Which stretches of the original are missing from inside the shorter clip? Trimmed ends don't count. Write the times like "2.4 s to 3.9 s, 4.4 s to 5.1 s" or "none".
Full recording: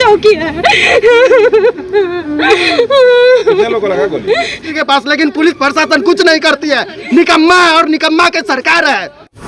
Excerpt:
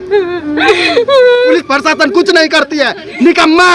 3.4 s to 5.5 s